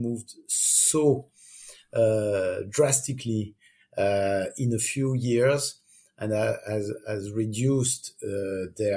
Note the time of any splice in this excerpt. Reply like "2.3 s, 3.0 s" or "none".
none